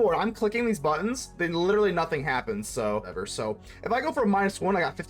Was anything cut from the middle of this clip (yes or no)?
yes